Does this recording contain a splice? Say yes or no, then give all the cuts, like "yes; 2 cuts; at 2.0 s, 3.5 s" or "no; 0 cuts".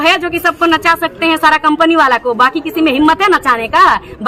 no; 0 cuts